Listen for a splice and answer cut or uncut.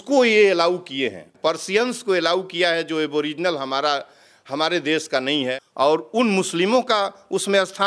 cut